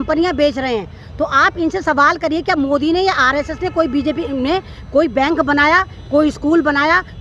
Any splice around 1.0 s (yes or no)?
no